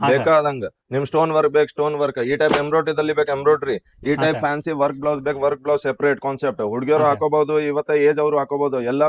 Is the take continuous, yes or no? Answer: yes